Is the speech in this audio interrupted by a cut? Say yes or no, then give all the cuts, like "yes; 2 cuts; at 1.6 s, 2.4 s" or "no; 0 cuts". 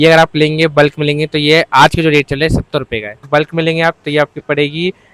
yes; 1 cut; at 3.2 s